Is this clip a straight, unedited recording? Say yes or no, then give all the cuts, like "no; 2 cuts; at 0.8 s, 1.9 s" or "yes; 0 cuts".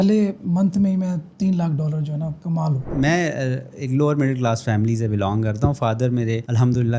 no; 1 cut; at 2.9 s